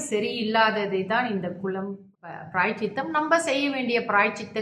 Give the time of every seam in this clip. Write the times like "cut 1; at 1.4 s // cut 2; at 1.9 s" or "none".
cut 1; at 2.0 s